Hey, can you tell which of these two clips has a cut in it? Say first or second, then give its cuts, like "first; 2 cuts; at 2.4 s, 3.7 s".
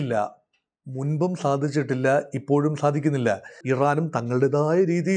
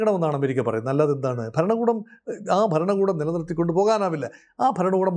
first; 1 cut; at 3.5 s